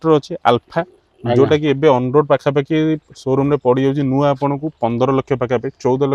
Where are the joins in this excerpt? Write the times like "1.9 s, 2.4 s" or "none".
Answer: none